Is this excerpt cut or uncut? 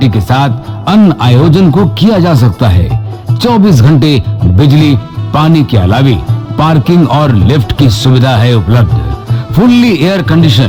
uncut